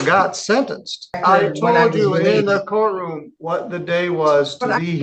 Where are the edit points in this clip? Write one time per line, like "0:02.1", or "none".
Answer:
0:01.2